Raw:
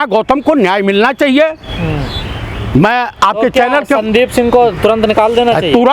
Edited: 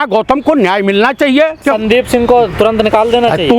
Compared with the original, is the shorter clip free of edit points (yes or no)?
no